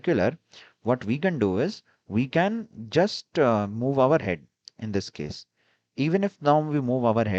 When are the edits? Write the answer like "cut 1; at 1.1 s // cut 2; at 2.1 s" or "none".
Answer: none